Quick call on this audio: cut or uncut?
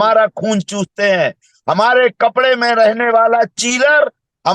uncut